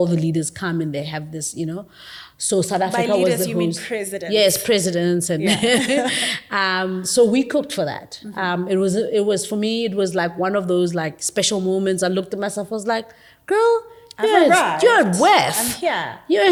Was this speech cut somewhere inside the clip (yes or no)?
no